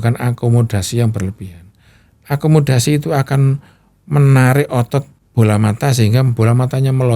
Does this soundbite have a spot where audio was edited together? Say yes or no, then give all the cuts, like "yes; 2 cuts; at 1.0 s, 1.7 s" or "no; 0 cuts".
yes; 1 cut; at 5.2 s